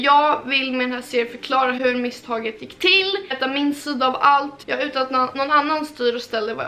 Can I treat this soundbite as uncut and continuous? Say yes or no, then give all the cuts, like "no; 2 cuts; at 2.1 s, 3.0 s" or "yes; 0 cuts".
no; 2 cuts; at 3.3 s, 4.6 s